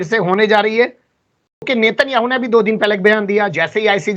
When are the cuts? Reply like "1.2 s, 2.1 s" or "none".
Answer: 1.7 s